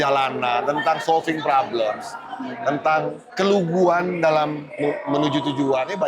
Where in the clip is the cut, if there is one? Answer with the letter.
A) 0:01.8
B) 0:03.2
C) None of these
B